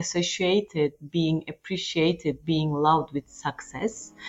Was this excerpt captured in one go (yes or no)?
yes